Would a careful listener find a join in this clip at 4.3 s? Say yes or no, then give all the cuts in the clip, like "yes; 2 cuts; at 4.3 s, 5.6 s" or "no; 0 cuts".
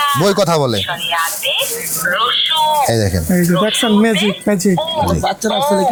no; 0 cuts